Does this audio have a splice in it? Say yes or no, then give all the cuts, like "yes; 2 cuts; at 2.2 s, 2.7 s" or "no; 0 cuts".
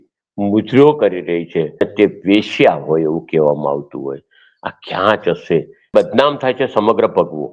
yes; 2 cuts; at 1.8 s, 5.9 s